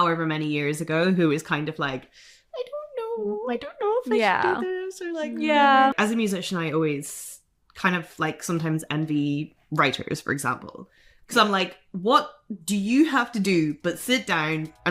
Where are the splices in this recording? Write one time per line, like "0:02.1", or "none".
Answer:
0:05.9